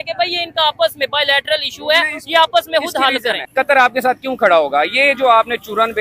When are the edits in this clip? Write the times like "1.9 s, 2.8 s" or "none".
3.4 s